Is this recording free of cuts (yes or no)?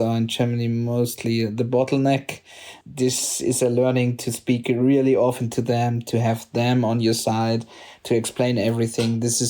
no